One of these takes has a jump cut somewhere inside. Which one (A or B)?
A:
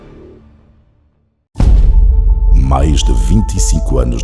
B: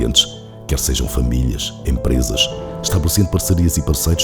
A